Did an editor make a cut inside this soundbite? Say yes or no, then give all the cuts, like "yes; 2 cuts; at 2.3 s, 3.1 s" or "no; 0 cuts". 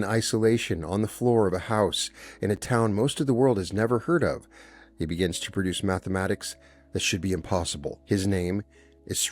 yes; 1 cut; at 8.0 s